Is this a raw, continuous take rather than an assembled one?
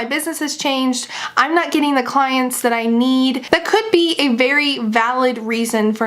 no; 1 cut; at 3.4 s

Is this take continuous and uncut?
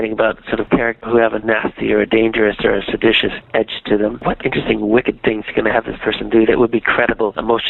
no; 1 cut; at 4.2 s

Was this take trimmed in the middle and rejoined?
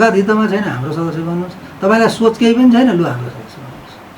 no; 0 cuts

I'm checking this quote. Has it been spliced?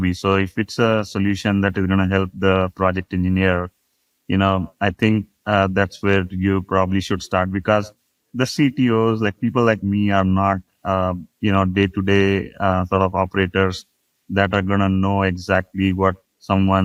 no; 0 cuts

